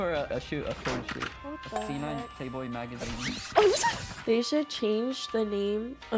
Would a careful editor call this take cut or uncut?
cut